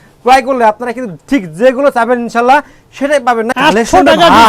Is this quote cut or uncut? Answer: cut